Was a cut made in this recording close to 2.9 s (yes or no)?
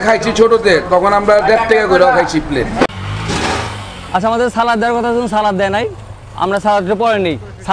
yes